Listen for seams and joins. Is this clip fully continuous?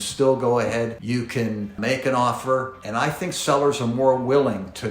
no; 1 cut; at 1.0 s

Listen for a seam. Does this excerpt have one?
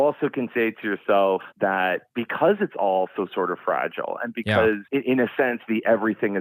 no; 0 cuts

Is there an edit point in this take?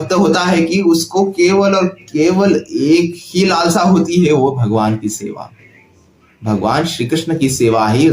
no; 0 cuts

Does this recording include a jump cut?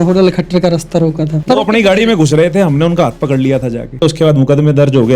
yes; 2 cuts; at 1.4 s, 4.0 s

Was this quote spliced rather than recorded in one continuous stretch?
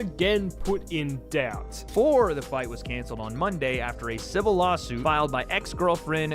yes; 1 cut; at 1.8 s

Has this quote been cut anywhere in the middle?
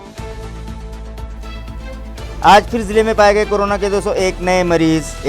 no; 0 cuts

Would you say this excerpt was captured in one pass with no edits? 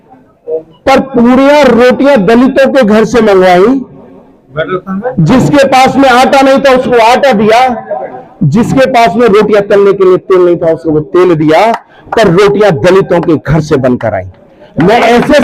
yes; 0 cuts

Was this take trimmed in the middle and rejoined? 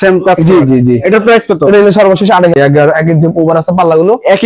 yes; 1 cut; at 2.5 s

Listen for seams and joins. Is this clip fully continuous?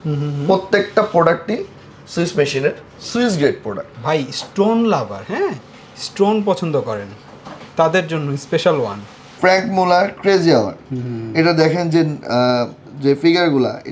no; 2 cuts; at 3.8 s, 9.2 s

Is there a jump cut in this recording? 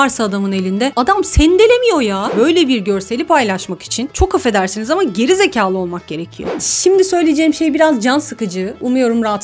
yes; 2 cuts; at 2.3 s, 6.4 s

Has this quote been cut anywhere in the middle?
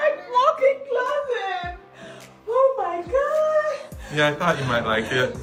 no; 0 cuts

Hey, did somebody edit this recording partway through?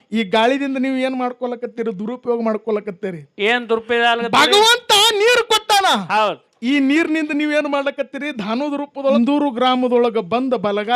yes; 1 cut; at 9.2 s

